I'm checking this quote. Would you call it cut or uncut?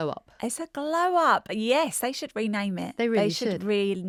uncut